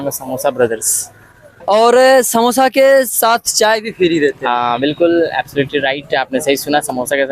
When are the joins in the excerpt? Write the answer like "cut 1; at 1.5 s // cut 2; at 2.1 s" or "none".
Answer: cut 1; at 1.5 s